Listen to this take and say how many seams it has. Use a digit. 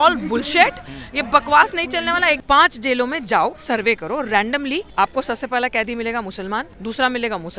3